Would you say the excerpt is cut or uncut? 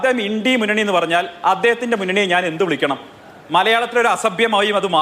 uncut